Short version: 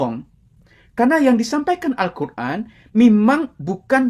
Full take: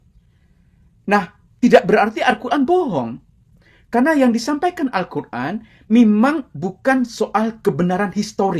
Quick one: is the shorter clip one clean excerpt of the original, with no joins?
yes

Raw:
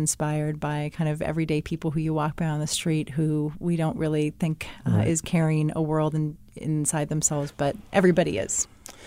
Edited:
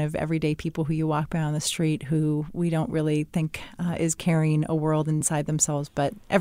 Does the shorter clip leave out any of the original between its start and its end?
yes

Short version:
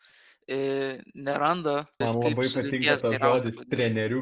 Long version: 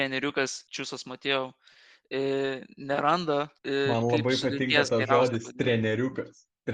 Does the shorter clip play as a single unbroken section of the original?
no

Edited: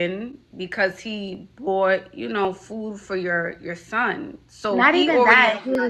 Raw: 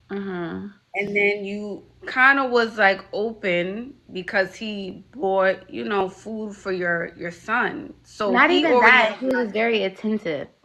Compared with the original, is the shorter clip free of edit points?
yes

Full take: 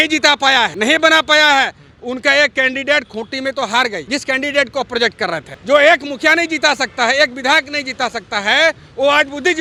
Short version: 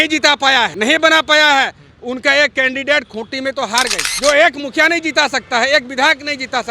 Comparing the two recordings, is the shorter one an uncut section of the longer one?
no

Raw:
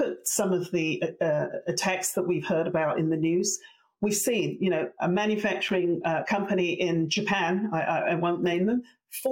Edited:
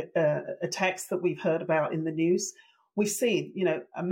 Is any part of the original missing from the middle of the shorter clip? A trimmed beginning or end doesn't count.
no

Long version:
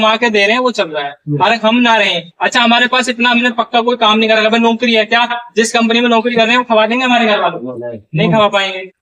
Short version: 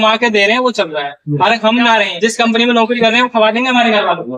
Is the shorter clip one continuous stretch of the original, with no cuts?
no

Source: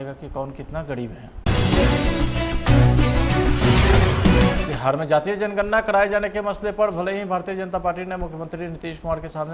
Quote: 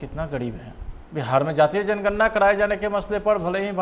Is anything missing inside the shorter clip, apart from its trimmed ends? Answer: yes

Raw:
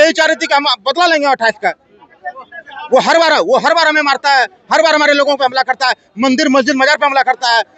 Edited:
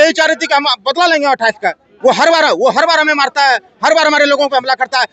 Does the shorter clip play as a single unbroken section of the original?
no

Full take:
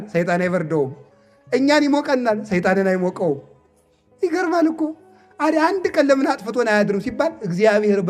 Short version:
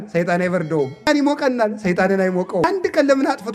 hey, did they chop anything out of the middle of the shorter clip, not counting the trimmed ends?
yes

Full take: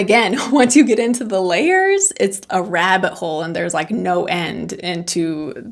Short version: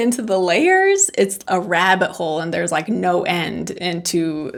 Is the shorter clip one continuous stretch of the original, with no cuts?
yes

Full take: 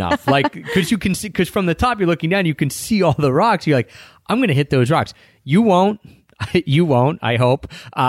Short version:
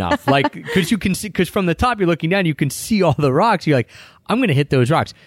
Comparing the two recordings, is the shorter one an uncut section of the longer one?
yes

